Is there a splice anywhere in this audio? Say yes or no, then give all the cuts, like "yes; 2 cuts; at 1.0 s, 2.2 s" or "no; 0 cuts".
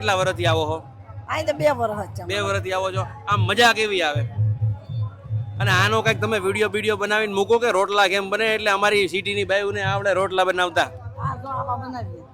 no; 0 cuts